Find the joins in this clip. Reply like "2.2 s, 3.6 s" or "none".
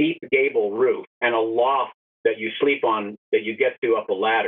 1.1 s, 2.0 s